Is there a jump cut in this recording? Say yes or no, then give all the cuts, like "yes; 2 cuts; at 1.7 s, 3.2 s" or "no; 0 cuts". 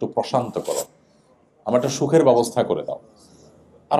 no; 0 cuts